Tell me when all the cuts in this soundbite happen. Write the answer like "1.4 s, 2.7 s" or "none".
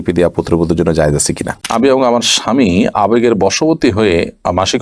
1.7 s